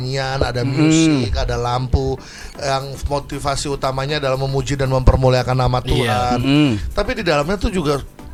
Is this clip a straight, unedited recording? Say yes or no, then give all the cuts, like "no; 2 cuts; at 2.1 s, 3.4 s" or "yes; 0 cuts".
yes; 0 cuts